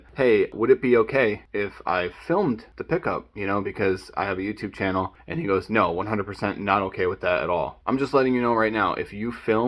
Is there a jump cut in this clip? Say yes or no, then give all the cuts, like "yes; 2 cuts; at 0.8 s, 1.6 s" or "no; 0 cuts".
yes; 1 cut; at 7.8 s